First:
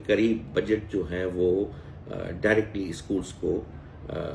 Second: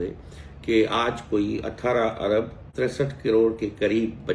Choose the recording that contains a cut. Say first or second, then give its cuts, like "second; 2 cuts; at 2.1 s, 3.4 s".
second; 1 cut; at 2.6 s